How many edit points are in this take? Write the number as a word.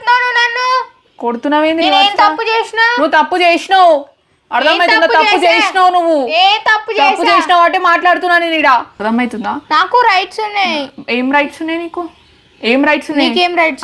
one